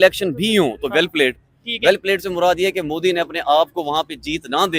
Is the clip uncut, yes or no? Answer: yes